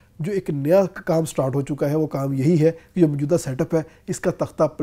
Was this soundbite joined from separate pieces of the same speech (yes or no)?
no